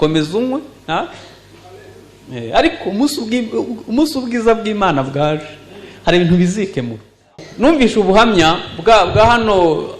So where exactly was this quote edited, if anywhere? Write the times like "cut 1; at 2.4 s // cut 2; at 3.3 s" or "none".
cut 1; at 7.4 s